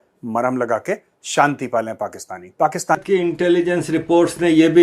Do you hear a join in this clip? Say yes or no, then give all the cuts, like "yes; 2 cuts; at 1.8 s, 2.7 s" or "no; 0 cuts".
yes; 1 cut; at 3.0 s